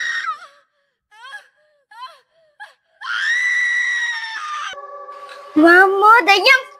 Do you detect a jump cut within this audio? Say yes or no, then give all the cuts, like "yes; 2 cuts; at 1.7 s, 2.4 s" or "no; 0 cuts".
yes; 1 cut; at 4.7 s